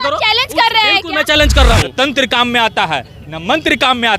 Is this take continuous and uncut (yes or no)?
no